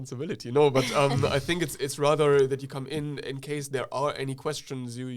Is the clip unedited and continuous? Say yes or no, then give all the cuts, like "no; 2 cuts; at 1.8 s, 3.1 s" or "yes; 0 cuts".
yes; 0 cuts